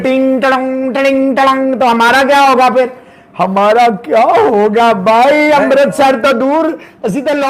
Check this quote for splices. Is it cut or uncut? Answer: uncut